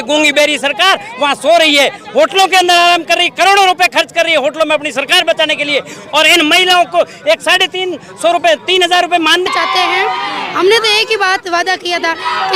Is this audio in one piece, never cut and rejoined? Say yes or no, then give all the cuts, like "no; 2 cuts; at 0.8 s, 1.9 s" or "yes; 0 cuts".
no; 1 cut; at 9.5 s